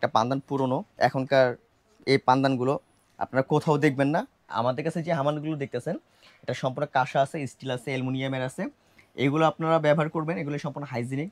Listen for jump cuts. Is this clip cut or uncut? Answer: cut